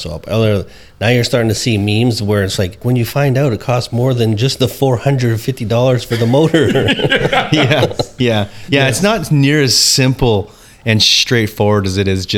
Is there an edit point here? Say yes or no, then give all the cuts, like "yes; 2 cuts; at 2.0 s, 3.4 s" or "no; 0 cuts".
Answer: yes; 1 cut; at 2.8 s